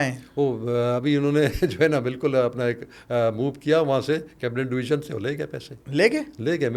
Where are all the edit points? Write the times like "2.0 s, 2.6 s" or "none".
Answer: none